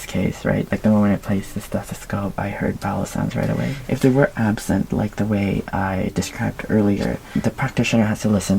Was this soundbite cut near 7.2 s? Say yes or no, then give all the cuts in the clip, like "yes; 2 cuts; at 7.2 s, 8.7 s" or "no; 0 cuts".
yes; 2 cuts; at 3.8 s, 7.2 s